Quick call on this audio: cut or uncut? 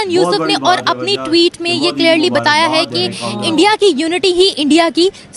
uncut